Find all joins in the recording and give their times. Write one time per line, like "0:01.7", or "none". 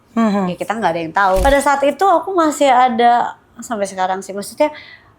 0:01.4